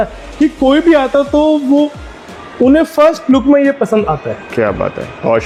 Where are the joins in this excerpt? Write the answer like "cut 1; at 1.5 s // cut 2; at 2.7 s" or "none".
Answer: none